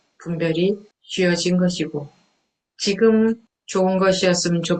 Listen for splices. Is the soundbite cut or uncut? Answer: cut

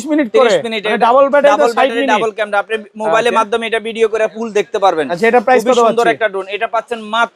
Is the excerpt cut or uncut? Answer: uncut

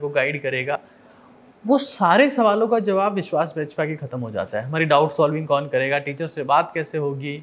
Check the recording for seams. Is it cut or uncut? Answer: uncut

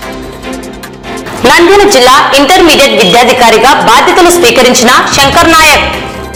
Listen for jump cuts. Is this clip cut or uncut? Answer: uncut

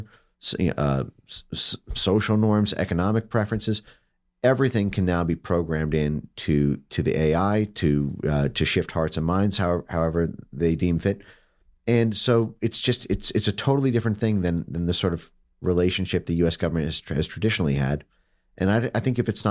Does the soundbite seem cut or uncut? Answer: uncut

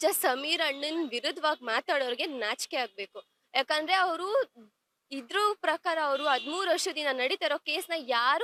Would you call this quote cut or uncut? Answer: uncut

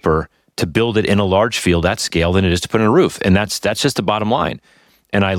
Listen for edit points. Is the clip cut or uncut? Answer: uncut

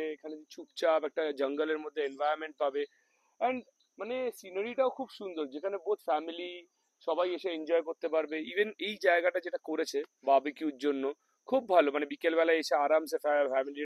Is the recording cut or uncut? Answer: uncut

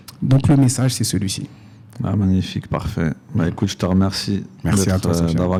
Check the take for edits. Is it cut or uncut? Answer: uncut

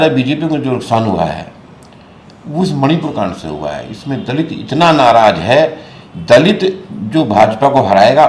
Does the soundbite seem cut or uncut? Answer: uncut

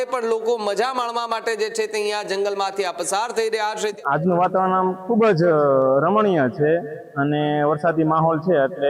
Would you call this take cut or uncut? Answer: cut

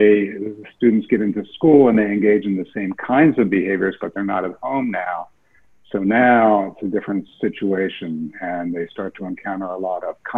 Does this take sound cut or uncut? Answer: uncut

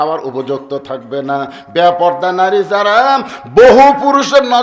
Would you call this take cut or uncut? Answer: uncut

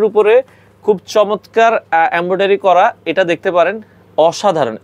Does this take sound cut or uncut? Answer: uncut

